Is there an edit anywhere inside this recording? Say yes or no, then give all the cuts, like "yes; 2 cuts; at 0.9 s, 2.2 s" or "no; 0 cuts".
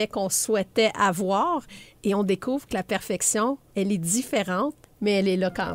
yes; 2 cuts; at 3.6 s, 4.8 s